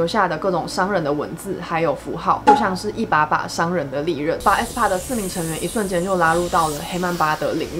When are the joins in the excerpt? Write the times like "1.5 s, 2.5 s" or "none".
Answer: 4.4 s

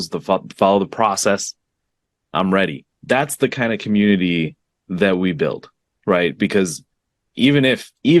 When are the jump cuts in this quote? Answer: 2.9 s

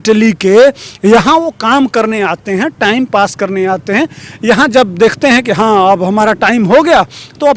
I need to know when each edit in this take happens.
none

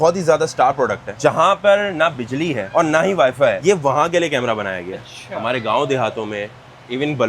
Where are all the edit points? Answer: none

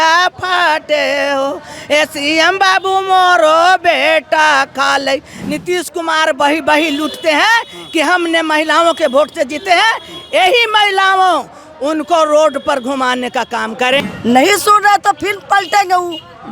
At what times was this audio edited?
5.3 s, 14.0 s

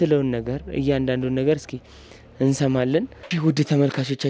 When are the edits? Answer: 3.2 s

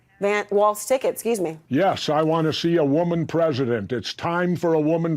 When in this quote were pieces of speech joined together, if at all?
1.6 s

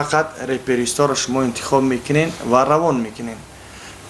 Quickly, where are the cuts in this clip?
none

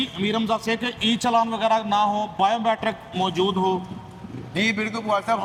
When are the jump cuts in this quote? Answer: none

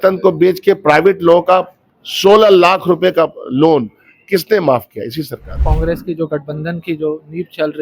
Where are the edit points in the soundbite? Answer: 5.7 s

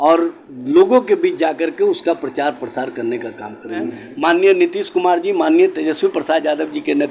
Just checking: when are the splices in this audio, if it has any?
4.0 s

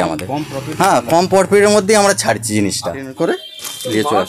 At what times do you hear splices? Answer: 3.1 s

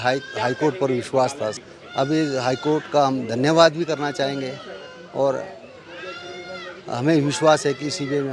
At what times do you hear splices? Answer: 1.5 s

